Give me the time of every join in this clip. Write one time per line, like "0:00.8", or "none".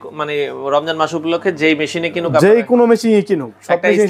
none